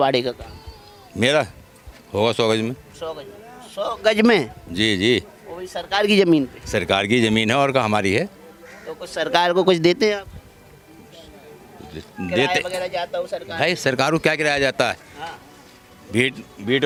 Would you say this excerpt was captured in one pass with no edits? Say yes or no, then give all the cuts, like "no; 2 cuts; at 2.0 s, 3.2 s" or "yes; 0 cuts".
yes; 0 cuts